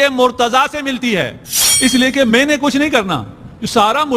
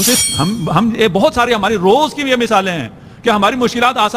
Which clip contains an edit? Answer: first; 1 cut; at 1.4 s

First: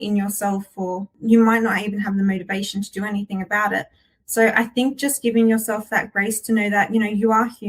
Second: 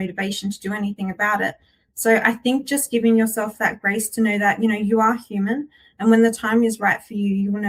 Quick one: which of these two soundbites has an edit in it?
first; 1 cut; at 1.1 s

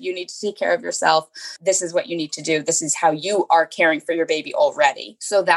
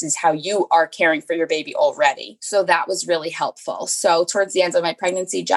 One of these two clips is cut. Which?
first; 1 cut; at 1.4 s

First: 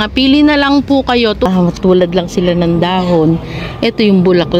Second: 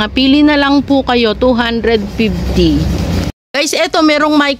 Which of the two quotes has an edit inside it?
first; 1 cut; at 1.5 s

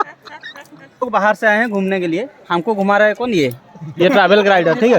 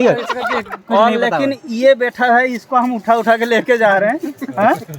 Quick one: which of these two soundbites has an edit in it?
first; 1 cut; at 0.9 s

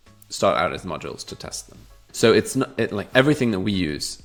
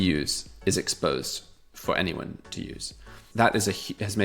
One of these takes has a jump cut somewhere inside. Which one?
second; 1 cut; at 3.2 s

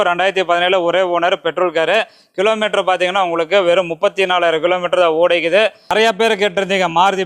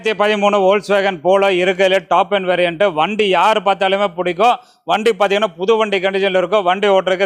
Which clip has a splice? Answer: first; 1 cut; at 5.8 s

